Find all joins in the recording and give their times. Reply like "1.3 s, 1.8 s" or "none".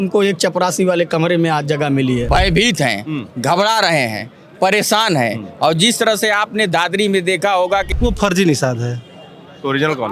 2.2 s, 7.9 s

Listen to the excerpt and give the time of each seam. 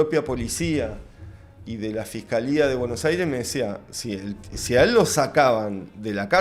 none

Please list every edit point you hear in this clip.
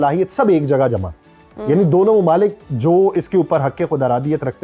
none

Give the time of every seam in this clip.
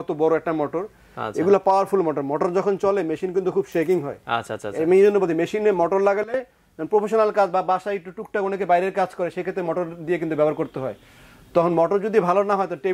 none

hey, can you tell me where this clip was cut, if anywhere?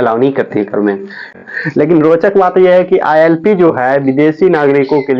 1.3 s

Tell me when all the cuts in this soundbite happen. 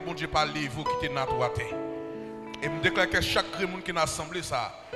none

